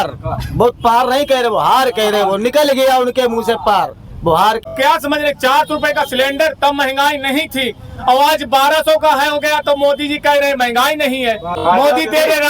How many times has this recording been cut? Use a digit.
2